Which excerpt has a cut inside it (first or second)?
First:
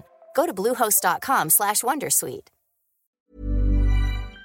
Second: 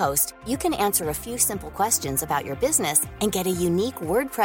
first